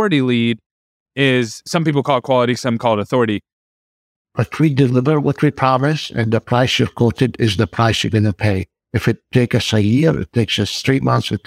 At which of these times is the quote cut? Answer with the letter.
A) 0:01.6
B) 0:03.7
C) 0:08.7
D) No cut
B